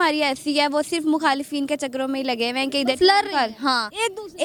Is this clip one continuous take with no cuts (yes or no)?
yes